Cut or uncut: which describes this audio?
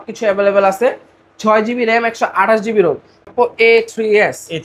cut